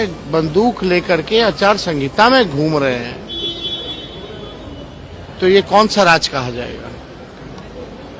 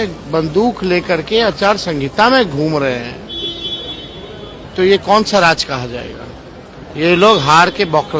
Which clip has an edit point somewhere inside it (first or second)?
second